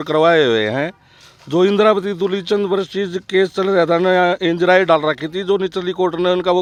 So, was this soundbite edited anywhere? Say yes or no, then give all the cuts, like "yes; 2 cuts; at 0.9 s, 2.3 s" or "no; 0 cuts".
no; 0 cuts